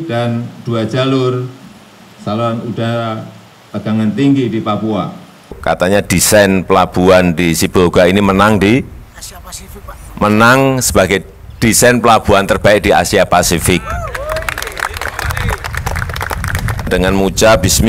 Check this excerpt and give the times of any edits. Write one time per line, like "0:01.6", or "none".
0:05.6
0:16.9